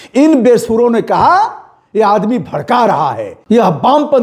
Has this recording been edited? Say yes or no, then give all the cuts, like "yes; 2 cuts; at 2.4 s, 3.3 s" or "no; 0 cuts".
yes; 1 cut; at 3.3 s